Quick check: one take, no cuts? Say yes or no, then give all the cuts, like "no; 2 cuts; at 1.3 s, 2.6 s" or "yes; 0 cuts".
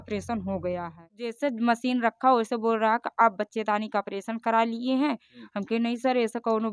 no; 1 cut; at 1.4 s